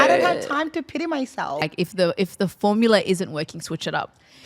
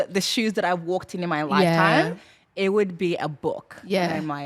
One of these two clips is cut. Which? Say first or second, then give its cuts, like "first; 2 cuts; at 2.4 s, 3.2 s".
first; 1 cut; at 1.6 s